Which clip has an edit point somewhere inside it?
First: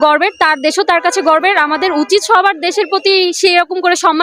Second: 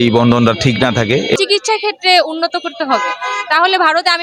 second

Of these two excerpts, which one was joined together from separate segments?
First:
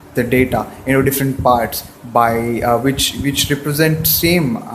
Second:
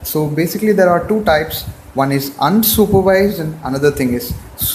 first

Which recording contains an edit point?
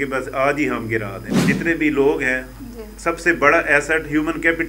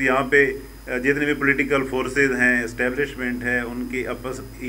first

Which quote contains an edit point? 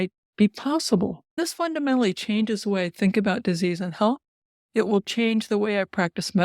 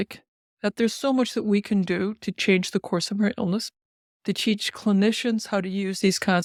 first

